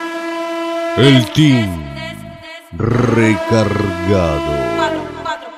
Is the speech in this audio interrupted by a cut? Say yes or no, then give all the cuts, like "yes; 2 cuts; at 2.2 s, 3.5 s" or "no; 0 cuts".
yes; 1 cut; at 1.0 s